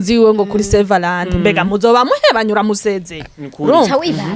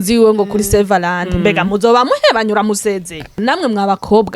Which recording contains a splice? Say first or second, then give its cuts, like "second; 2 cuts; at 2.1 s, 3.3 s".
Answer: second; 1 cut; at 3.4 s